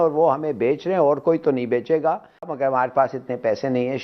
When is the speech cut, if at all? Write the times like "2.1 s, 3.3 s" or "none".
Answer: 2.5 s